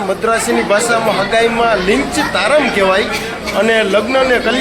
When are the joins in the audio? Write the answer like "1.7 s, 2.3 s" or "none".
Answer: none